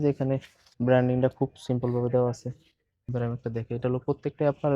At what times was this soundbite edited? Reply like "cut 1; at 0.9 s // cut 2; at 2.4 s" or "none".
cut 1; at 3.1 s